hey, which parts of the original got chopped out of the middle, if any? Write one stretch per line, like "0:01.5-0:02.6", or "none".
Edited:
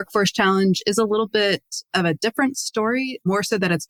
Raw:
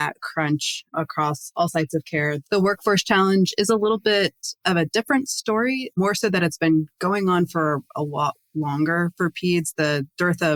none